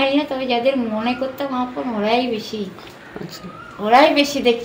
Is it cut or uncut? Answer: uncut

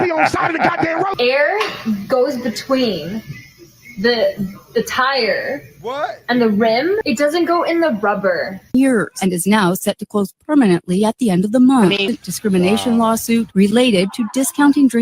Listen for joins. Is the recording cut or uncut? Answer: cut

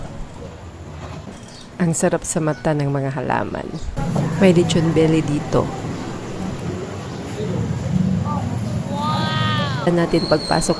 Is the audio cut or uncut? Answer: cut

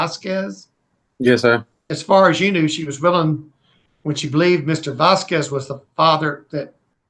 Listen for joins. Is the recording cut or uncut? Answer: cut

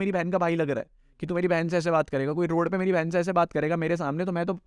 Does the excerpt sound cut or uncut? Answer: uncut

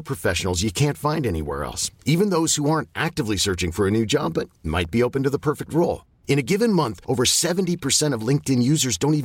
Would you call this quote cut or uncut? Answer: uncut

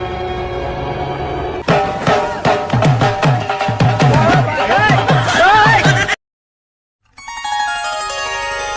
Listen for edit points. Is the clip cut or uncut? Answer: cut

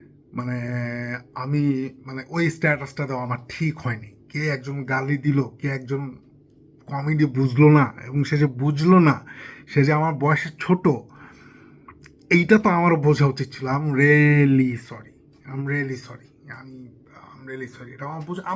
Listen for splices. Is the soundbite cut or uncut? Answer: uncut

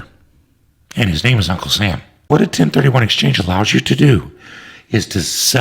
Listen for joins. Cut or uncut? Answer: cut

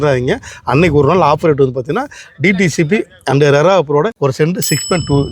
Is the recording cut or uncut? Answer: cut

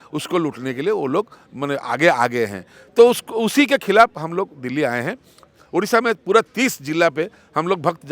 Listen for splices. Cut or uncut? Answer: uncut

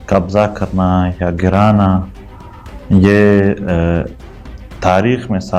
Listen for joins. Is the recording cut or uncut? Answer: uncut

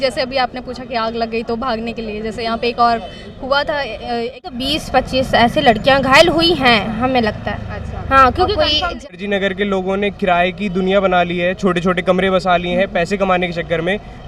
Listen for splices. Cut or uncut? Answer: cut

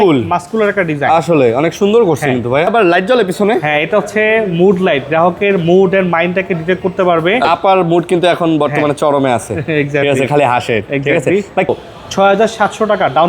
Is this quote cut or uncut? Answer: cut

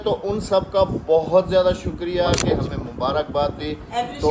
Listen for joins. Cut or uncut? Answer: cut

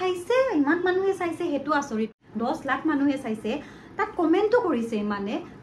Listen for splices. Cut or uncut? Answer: cut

